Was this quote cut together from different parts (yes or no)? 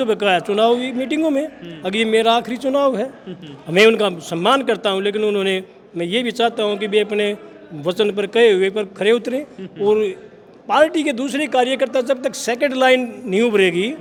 no